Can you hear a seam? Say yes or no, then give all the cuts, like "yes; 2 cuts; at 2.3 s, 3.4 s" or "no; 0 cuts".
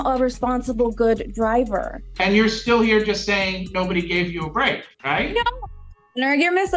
yes; 2 cuts; at 2.0 s, 4.9 s